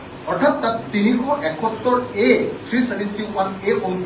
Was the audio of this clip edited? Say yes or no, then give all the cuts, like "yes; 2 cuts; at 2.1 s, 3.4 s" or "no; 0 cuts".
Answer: no; 0 cuts